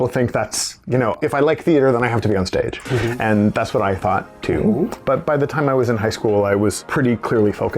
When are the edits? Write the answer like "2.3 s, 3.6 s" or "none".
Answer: 1.1 s, 5.0 s, 6.8 s